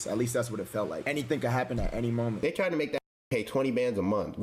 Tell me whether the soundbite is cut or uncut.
cut